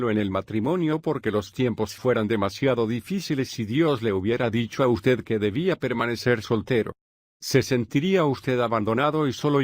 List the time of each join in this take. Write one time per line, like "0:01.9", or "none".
0:01.4